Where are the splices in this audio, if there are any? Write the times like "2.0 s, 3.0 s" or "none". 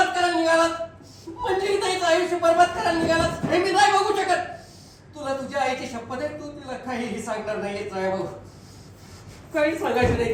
none